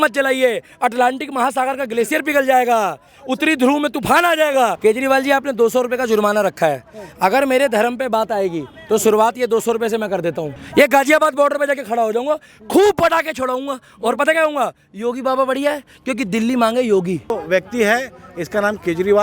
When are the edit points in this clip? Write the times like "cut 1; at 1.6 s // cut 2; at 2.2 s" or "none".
cut 1; at 4.8 s // cut 2; at 10.5 s // cut 3; at 17.3 s